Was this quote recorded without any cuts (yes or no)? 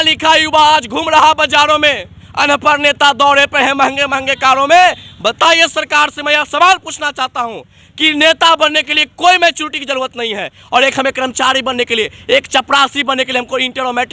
yes